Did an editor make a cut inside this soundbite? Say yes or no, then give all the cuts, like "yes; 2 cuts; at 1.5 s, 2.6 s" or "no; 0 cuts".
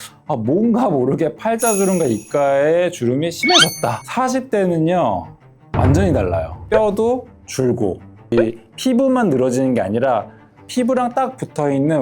yes; 3 cuts; at 4.0 s, 6.5 s, 8.3 s